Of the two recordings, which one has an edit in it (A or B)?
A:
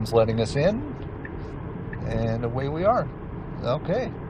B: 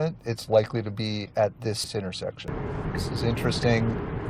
B